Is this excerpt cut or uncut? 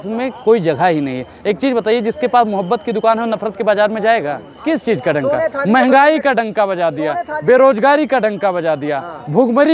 cut